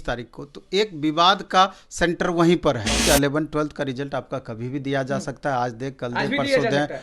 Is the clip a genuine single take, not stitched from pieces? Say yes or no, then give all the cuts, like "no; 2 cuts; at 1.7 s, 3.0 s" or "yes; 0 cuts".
no; 1 cut; at 3.0 s